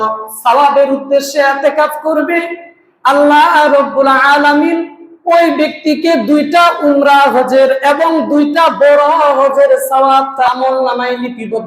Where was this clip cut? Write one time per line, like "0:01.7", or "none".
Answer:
0:10.5